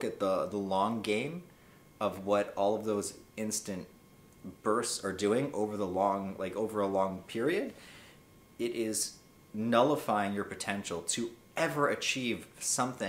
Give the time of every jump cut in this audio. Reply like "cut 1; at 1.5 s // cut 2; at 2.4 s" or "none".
none